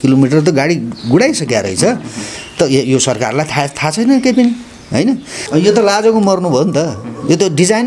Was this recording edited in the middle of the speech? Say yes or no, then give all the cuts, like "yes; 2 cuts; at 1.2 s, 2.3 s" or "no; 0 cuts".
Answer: yes; 1 cut; at 5.4 s